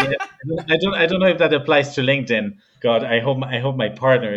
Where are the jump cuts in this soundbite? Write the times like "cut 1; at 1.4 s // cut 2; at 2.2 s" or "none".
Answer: cut 1; at 2.6 s

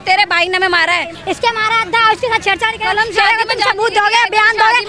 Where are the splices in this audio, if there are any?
cut 1; at 1.2 s

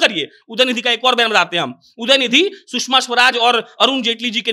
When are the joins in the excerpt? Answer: none

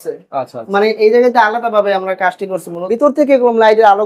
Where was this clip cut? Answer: cut 1; at 2.7 s

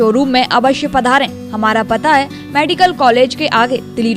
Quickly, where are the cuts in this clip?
none

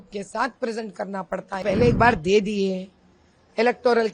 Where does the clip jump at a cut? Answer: cut 1; at 1.6 s

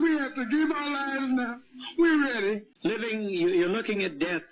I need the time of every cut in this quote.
cut 1; at 2.7 s

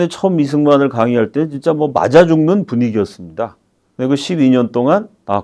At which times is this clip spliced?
cut 1; at 3.8 s

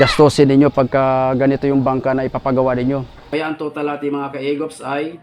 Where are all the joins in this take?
cut 1; at 3.2 s

